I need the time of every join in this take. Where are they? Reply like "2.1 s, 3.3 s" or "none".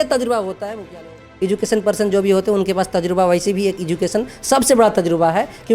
1.2 s